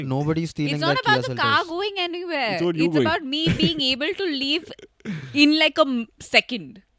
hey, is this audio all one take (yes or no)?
yes